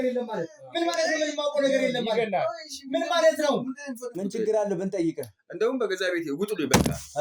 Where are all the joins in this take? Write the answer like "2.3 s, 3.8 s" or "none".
4.2 s

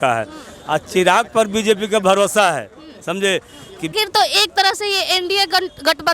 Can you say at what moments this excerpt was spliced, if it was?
3.9 s

